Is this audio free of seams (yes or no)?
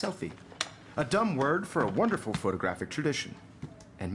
yes